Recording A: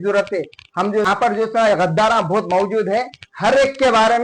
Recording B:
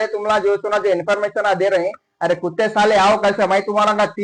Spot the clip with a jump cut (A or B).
A